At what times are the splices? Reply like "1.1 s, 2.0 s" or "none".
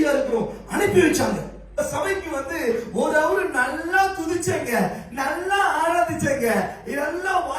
1.8 s